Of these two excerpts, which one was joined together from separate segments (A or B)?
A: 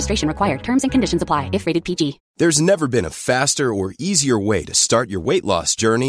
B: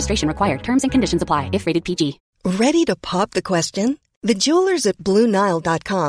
B